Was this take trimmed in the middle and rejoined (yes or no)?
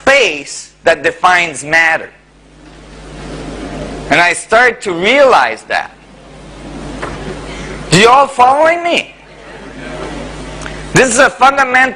yes